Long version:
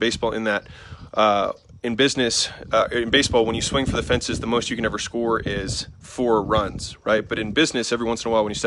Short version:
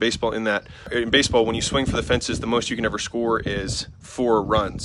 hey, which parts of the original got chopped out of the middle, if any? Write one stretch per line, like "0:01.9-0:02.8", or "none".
0:00.9-0:02.9